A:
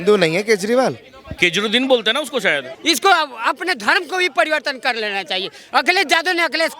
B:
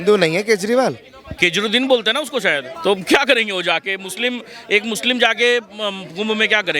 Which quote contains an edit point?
A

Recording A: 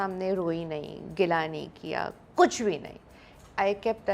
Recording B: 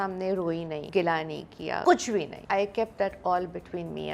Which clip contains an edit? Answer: B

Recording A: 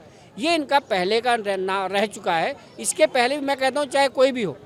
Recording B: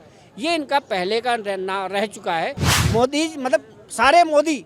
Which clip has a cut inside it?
B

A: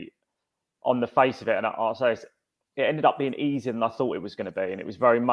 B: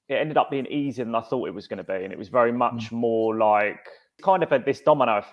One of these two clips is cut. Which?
B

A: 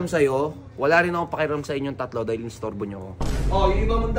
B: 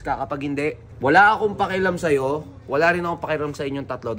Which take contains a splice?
A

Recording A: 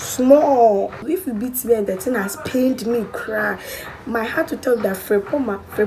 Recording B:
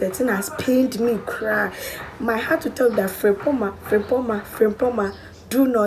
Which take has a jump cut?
A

